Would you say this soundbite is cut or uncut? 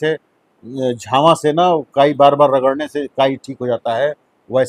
uncut